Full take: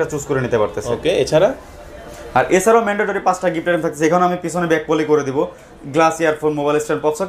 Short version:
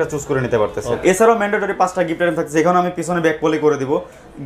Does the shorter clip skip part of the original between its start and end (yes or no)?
yes